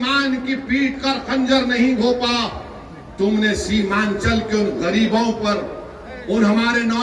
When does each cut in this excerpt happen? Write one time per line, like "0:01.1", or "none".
none